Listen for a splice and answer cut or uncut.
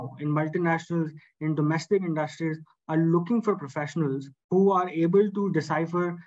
cut